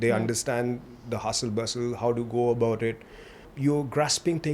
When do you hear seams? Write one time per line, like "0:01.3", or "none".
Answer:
0:03.5